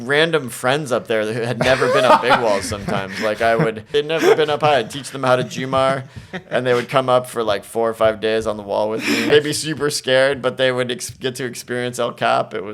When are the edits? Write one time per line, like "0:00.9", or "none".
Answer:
0:03.9
0:09.3